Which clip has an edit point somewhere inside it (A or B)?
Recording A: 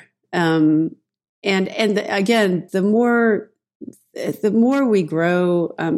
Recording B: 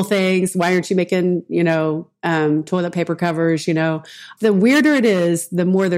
B